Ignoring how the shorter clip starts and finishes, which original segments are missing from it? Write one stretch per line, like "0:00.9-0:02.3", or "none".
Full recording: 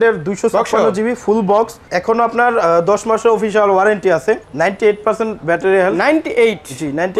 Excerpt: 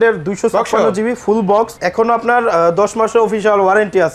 0:01.8-0:01.9